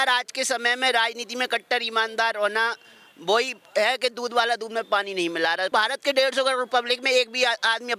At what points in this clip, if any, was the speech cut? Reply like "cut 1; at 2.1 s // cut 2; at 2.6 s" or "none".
cut 1; at 5.7 s